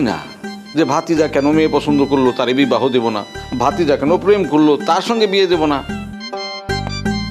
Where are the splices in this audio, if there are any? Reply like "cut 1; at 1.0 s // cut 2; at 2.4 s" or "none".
cut 1; at 6.1 s